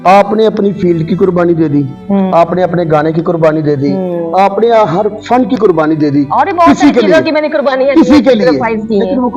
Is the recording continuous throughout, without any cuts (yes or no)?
yes